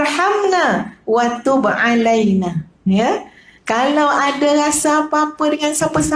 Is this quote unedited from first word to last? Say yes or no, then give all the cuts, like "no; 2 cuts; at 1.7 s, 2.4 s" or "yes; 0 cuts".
no; 1 cut; at 2.9 s